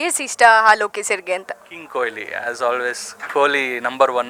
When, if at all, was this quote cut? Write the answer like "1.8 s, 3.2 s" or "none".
none

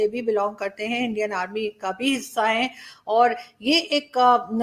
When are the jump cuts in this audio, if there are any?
none

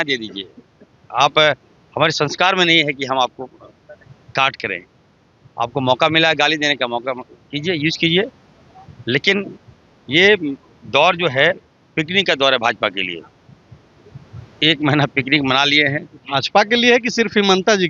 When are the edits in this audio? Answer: none

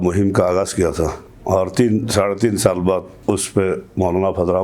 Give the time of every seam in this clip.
1.2 s, 3.1 s

